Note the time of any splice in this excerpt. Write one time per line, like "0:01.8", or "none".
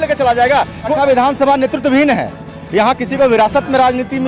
0:00.9